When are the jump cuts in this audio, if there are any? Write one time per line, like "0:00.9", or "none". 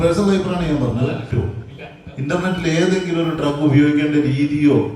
0:01.3